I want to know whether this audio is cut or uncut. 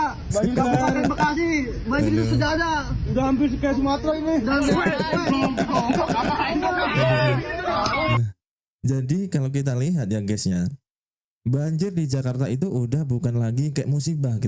uncut